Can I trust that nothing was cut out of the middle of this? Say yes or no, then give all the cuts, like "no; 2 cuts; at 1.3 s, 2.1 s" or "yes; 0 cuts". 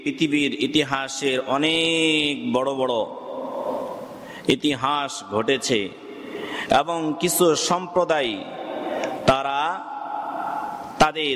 yes; 0 cuts